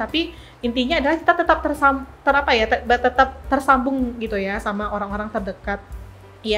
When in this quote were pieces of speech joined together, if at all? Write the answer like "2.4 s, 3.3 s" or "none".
none